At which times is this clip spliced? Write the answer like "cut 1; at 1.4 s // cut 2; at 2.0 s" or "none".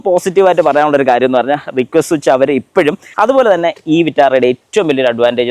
cut 1; at 3.0 s